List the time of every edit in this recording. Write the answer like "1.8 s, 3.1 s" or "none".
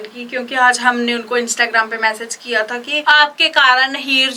none